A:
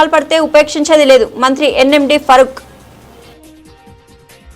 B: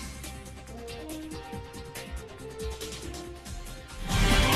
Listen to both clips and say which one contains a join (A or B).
A